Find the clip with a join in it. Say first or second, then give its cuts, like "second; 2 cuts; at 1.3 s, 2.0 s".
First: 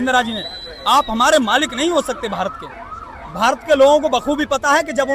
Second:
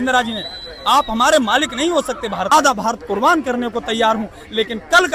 second; 1 cut; at 2.5 s